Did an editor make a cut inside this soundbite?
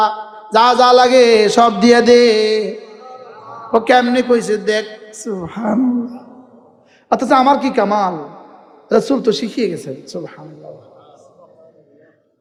no; 0 cuts

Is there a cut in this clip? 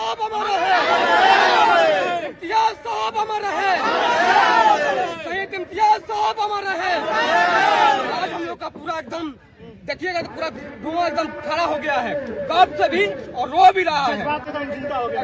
no; 0 cuts

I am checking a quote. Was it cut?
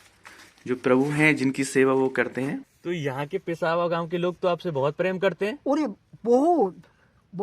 yes; 1 cut; at 2.7 s

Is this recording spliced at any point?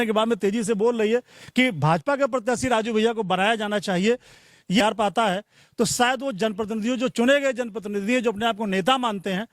yes; 1 cut; at 4.8 s

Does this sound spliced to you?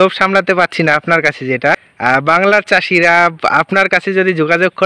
yes; 1 cut; at 1.9 s

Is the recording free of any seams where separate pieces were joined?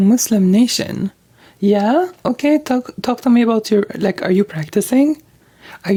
yes; 0 cuts

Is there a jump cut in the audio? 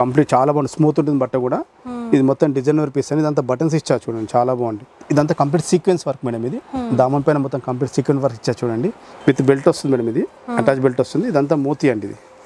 yes; 2 cuts; at 4.9 s, 9.1 s

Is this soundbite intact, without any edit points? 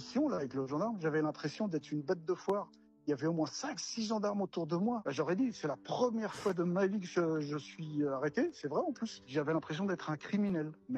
yes; 0 cuts

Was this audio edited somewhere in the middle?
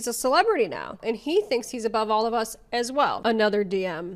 yes; 1 cut; at 3.2 s

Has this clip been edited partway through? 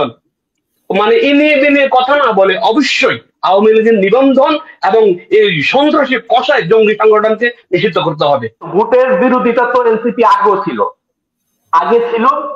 yes; 1 cut; at 8.6 s

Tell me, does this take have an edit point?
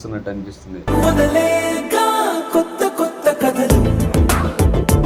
no; 0 cuts

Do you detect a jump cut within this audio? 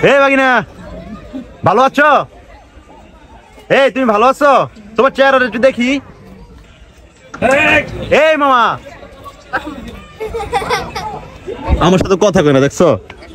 no; 0 cuts

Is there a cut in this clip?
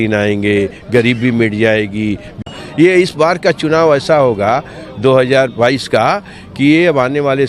yes; 1 cut; at 2.3 s

